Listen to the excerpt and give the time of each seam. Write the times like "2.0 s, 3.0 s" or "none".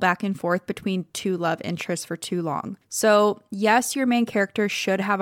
2.8 s